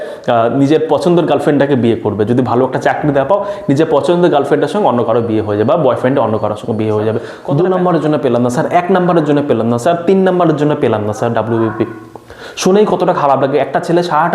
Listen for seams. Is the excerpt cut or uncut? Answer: cut